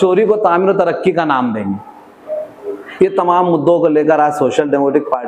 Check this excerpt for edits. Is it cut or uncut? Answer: uncut